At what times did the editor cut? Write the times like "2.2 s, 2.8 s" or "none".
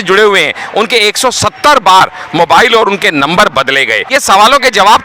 4.0 s